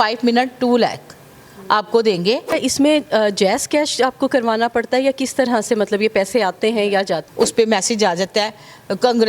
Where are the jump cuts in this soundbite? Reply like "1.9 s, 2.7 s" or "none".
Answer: 2.6 s, 7.3 s